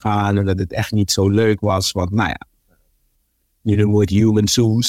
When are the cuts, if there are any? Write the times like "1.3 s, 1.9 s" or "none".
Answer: none